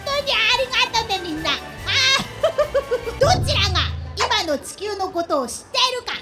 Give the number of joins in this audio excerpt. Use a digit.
1